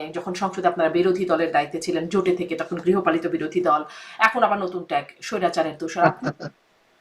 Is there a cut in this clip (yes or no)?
yes